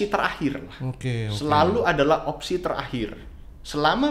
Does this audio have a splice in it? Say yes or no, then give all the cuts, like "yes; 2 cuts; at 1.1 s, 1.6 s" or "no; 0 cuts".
no; 0 cuts